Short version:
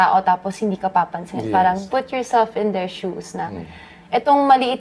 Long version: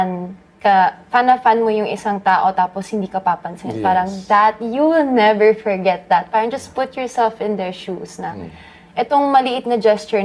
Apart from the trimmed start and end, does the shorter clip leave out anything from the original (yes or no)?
yes